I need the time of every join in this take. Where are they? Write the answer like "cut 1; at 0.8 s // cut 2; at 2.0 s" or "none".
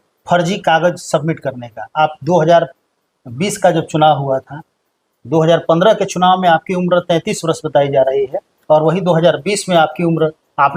none